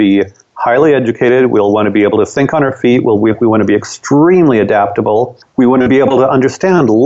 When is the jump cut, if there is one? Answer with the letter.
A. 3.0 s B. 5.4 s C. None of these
B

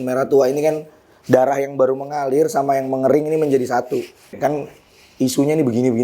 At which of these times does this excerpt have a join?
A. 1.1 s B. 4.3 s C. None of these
B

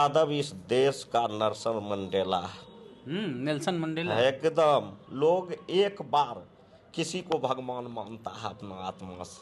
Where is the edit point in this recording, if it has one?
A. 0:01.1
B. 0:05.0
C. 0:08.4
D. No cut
B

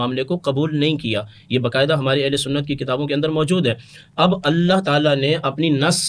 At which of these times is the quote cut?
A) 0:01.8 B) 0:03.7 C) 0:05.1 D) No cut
D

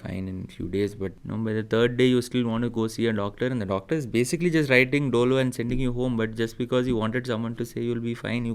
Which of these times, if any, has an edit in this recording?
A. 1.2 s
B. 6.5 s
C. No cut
A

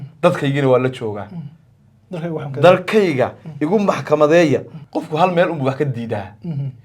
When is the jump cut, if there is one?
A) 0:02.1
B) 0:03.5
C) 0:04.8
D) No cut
C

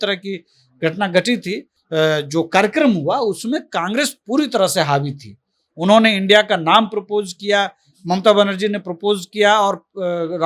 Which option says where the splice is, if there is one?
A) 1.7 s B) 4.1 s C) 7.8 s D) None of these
A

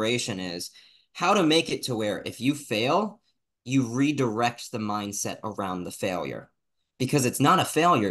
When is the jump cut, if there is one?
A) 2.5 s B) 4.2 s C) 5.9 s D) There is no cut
D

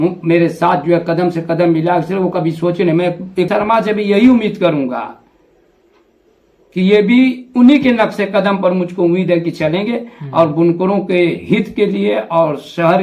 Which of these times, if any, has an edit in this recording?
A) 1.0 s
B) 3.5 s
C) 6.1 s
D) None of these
B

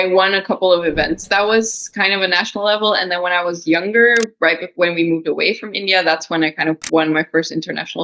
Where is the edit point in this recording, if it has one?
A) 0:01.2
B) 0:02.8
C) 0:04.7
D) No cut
A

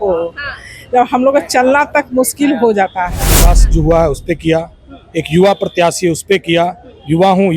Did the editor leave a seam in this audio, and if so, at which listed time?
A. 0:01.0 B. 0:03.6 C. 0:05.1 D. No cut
B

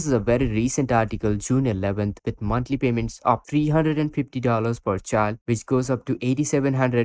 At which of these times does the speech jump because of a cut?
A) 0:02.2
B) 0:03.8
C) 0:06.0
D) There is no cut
A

